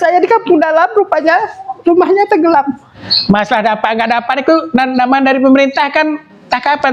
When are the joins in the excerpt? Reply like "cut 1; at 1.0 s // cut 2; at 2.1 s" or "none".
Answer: cut 1; at 2.9 s